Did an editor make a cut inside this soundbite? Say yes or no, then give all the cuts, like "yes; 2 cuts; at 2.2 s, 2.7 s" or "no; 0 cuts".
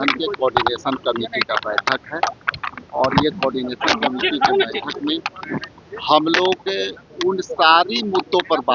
no; 0 cuts